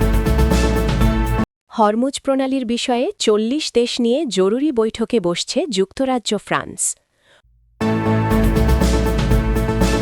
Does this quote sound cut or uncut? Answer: cut